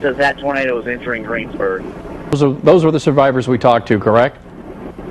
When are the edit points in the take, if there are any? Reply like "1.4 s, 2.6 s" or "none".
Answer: 2.3 s